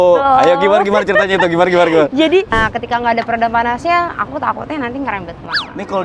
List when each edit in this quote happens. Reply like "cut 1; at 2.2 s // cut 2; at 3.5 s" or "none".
cut 1; at 2.5 s